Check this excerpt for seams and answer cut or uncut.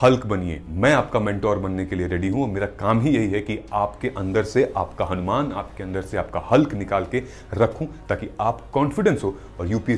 uncut